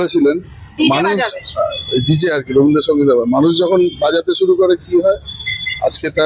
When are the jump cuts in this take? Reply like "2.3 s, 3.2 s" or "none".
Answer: none